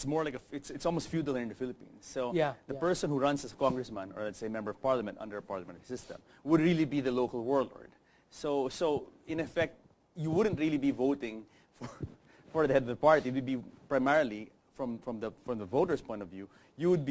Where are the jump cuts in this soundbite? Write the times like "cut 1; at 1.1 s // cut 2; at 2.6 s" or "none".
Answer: none